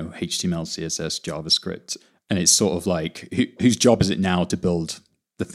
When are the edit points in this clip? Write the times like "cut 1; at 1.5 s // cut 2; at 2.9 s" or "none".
cut 1; at 1.9 s // cut 2; at 3.6 s